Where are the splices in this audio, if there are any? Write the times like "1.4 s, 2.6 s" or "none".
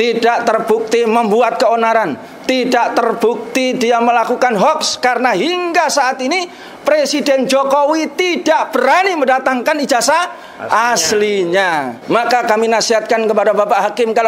11.9 s